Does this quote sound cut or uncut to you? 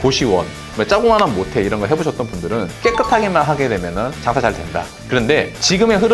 cut